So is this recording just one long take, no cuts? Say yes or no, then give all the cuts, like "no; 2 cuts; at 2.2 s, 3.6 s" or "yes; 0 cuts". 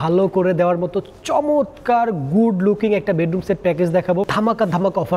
no; 1 cut; at 4.3 s